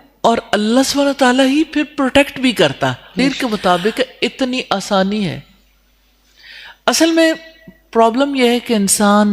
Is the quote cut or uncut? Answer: cut